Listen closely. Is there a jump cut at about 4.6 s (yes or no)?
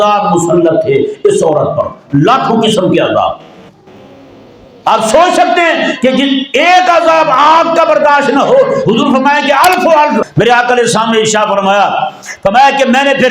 no